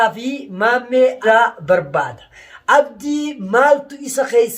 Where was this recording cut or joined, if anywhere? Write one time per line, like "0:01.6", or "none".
0:01.2